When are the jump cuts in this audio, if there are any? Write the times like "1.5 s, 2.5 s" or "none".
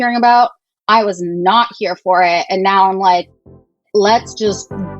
3.9 s